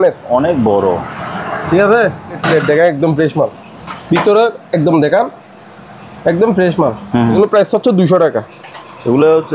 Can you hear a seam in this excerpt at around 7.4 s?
yes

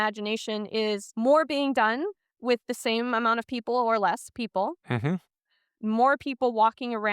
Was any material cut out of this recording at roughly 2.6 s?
no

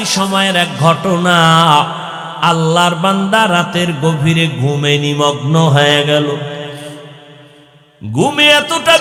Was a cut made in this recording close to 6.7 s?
no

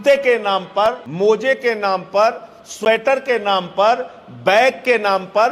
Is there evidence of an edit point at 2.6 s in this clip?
no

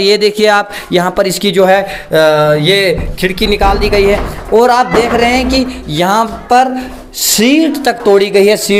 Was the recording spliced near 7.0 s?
no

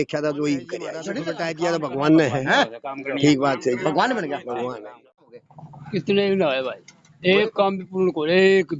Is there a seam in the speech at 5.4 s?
yes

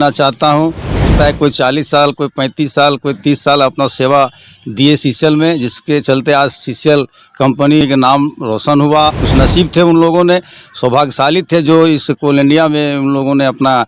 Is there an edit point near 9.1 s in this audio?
yes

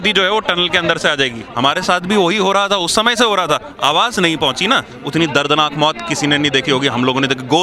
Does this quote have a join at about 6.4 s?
no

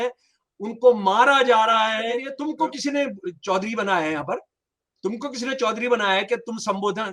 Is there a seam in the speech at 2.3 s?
yes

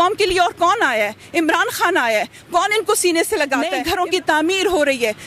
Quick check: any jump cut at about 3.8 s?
yes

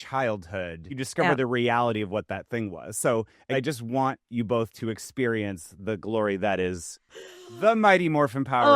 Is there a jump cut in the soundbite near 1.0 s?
yes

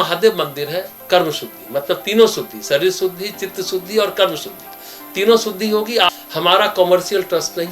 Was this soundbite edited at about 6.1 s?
yes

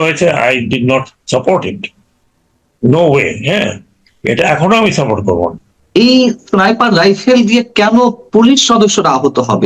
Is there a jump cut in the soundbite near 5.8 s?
yes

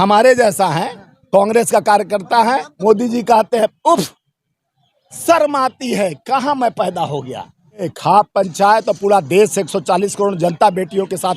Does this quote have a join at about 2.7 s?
yes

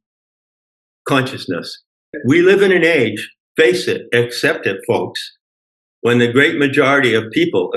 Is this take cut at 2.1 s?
yes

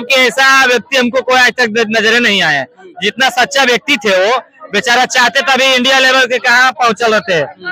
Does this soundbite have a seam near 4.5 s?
no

